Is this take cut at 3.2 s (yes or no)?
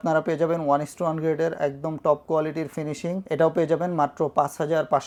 no